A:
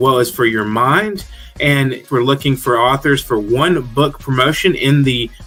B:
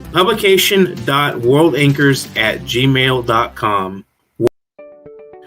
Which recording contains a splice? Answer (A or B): B